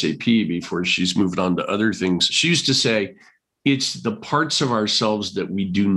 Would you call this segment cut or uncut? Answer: cut